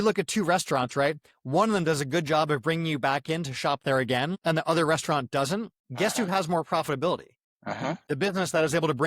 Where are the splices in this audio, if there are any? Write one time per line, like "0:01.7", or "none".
0:05.8
0:07.9